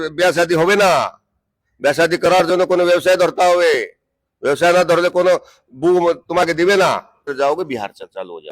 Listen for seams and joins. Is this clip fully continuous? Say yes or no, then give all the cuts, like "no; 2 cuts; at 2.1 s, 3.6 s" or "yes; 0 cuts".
no; 1 cut; at 7.3 s